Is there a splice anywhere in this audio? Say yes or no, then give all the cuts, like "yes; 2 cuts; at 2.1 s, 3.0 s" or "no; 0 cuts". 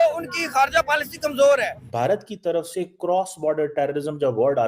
yes; 1 cut; at 1.9 s